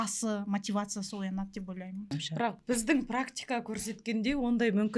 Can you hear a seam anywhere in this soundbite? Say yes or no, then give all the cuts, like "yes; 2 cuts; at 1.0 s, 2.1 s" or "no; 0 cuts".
no; 0 cuts